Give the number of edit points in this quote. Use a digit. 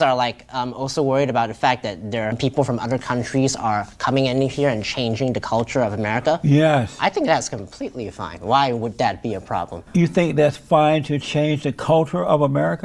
2